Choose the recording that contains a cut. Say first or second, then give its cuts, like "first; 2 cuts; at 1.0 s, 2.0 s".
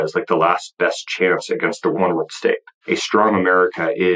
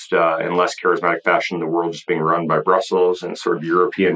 first; 2 cuts; at 1.9 s, 2.7 s